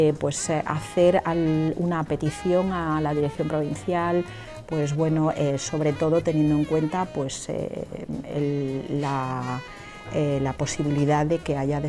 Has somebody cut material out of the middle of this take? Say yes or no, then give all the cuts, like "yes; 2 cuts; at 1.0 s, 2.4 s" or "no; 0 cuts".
no; 0 cuts